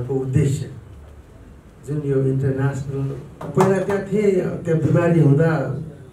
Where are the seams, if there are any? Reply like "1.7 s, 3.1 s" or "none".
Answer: 3.4 s